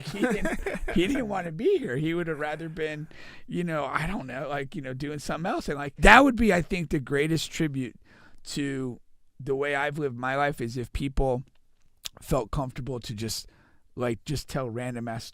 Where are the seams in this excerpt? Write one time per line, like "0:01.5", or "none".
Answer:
0:05.9